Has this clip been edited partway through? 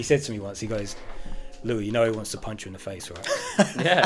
no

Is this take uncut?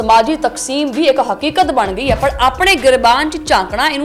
yes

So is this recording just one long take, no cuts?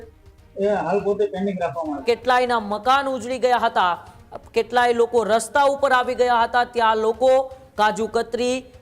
no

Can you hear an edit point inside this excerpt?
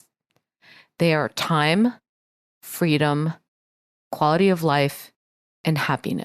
no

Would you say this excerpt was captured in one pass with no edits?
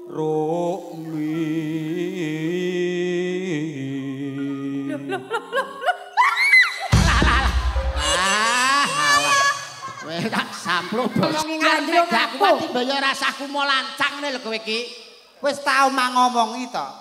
no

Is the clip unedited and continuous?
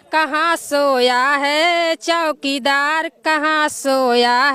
yes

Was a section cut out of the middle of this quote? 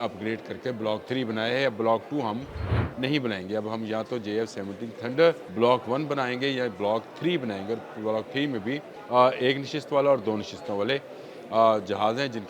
yes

